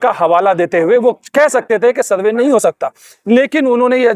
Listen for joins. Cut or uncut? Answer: uncut